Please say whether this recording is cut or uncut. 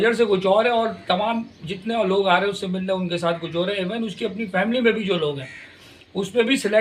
uncut